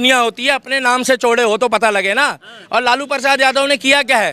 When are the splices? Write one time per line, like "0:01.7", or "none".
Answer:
none

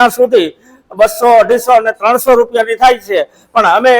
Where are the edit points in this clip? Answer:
none

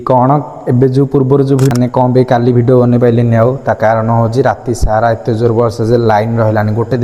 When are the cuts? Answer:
0:01.7

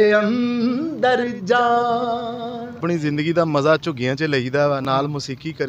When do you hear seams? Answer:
0:02.8

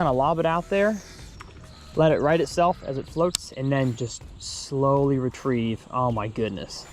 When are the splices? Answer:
none

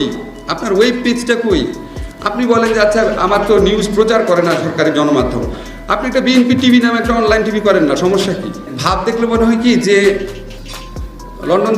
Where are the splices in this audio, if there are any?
0:08.7

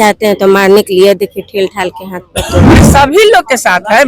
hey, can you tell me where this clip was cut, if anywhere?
0:02.9

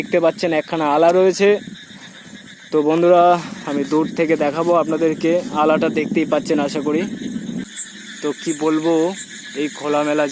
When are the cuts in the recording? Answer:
0:07.7

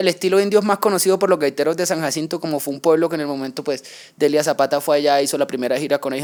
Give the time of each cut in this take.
none

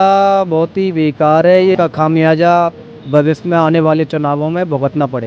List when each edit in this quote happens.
0:01.8

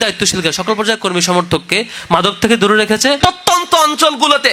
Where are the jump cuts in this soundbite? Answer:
0:03.2

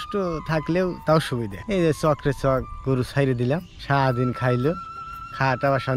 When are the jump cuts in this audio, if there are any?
0:01.6
0:03.7

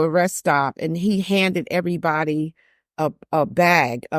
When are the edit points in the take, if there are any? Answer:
none

